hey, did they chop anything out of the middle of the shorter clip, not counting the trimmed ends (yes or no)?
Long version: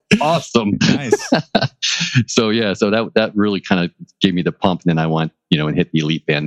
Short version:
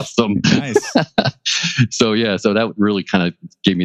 yes